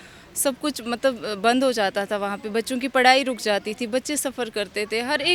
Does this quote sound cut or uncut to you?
uncut